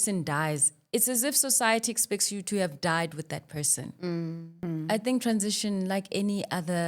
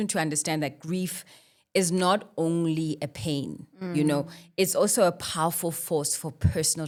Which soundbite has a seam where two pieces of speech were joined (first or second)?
first